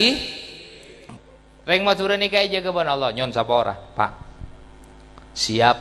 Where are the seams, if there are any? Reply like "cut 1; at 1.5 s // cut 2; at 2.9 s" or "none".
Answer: cut 1; at 1.1 s